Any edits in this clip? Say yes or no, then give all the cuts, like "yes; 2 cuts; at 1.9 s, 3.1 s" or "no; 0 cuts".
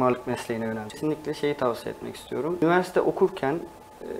yes; 1 cut; at 1.0 s